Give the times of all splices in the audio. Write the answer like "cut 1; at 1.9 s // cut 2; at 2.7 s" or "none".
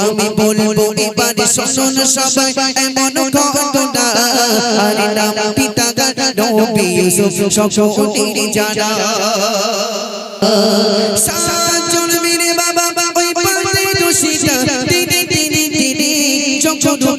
cut 1; at 10.4 s